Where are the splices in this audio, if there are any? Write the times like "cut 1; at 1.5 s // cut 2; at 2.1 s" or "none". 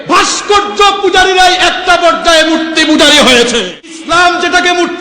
cut 1; at 4.0 s